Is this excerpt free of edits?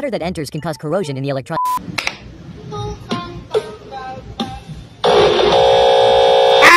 no; 1 cut; at 1.7 s

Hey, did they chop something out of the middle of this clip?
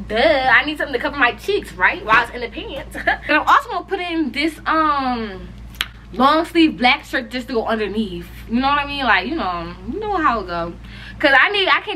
yes; 1 cut; at 3.3 s

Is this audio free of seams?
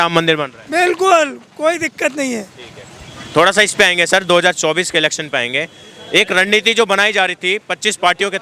yes; 0 cuts

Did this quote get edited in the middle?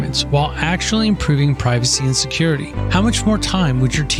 no; 0 cuts

